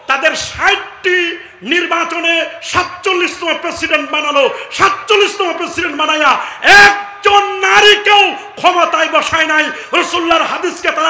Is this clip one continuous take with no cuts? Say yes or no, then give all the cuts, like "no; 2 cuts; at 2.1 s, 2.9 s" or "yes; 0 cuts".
yes; 0 cuts